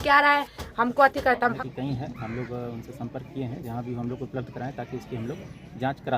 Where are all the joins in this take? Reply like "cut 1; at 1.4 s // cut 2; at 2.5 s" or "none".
cut 1; at 1.5 s